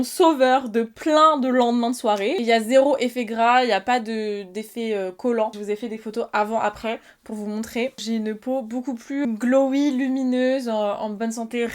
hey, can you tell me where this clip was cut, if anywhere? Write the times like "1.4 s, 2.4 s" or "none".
2.4 s, 5.5 s, 8.0 s, 9.2 s